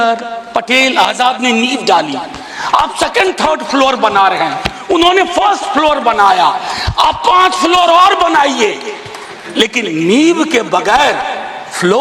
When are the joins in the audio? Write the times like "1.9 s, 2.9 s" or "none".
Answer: none